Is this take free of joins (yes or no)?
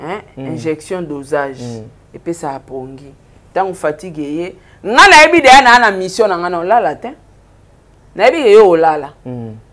yes